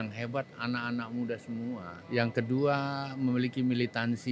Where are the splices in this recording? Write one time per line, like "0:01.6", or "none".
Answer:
0:01.9